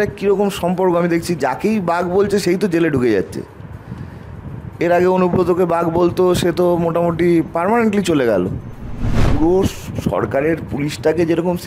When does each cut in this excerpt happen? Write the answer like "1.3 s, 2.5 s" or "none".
9.2 s